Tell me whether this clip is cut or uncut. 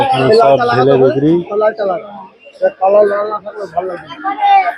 uncut